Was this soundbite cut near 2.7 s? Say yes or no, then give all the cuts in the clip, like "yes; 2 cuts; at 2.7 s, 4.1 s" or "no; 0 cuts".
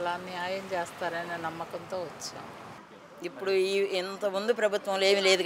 yes; 1 cut; at 2.7 s